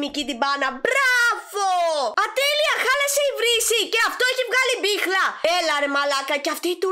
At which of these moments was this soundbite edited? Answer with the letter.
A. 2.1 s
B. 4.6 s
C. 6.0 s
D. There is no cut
A